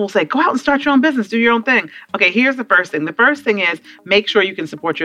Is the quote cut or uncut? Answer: uncut